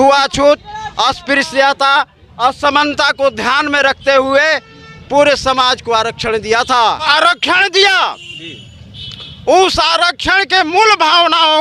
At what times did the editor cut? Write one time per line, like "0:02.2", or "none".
0:07.0